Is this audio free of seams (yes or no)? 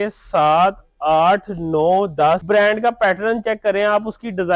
no